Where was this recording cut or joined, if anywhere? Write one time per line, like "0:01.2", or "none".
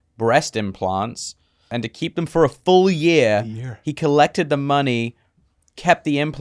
0:01.7